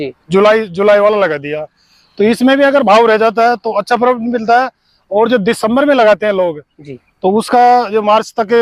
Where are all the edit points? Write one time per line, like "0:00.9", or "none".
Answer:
none